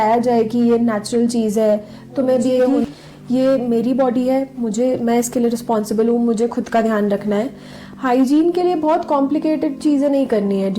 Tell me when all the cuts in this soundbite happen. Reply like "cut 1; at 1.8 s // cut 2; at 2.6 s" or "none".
cut 1; at 2.7 s